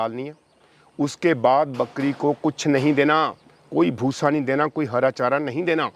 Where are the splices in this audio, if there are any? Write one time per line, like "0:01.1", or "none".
none